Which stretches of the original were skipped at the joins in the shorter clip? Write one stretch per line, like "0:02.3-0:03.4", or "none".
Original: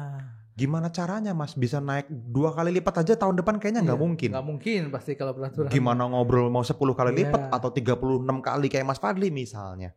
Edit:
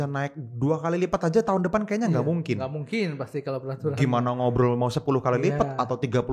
none